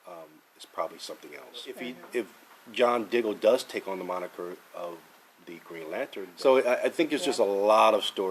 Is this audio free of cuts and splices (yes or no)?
no